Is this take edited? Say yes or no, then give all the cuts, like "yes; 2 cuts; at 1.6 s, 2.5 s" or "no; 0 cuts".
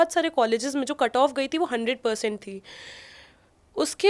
no; 0 cuts